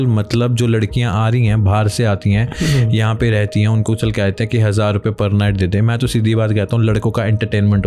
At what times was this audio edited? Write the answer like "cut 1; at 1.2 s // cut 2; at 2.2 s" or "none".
none